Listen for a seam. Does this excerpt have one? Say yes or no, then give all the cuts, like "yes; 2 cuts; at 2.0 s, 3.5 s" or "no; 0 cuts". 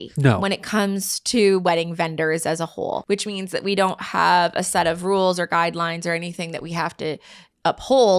yes; 1 cut; at 3.0 s